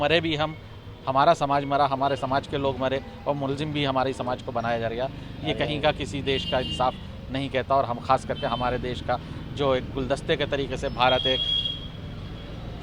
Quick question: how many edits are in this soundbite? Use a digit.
0